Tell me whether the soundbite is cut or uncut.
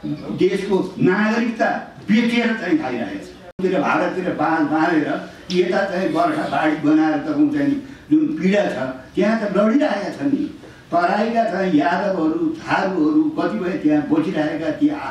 cut